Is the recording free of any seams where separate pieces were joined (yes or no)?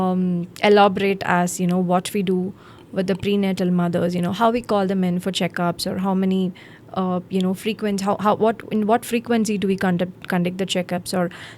yes